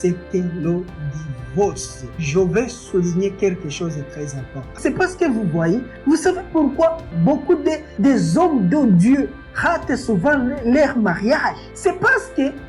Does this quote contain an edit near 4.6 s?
yes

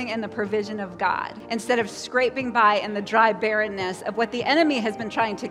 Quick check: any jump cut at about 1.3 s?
yes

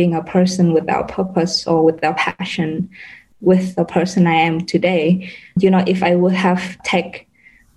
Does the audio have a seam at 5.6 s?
yes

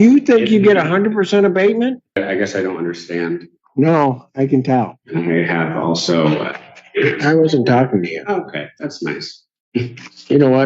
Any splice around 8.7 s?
no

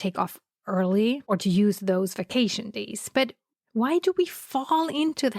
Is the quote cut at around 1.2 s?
yes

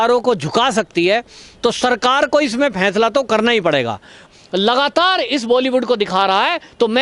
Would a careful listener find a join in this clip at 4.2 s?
yes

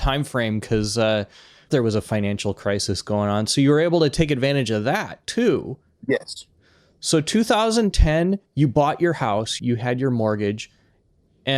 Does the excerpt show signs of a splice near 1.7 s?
yes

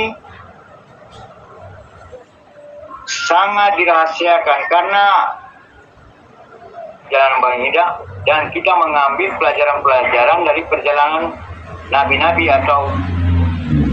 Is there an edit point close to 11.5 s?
no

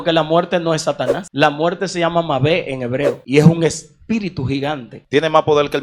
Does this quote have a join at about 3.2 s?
yes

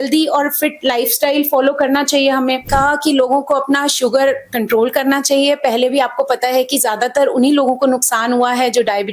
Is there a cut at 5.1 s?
no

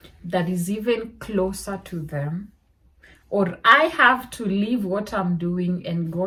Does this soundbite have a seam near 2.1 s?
no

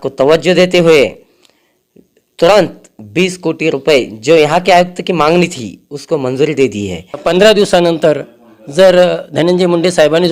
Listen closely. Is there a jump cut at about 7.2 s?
yes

